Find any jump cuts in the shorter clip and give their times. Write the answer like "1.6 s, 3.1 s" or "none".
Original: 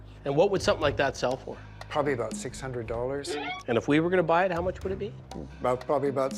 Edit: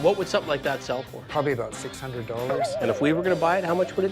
1.2 s, 2.6 s